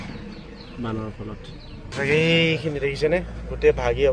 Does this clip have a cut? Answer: yes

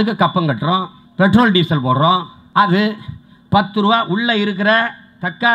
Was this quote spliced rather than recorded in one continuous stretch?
yes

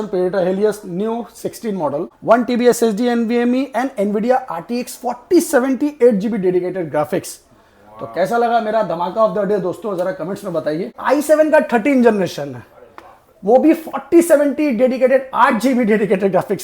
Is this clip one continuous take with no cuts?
no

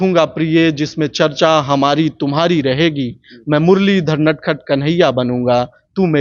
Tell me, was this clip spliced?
no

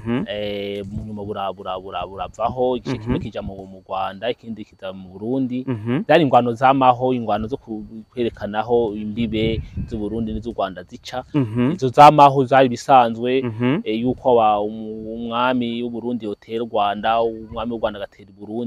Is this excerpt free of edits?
yes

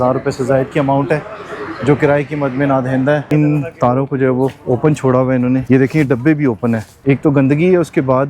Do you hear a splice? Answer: yes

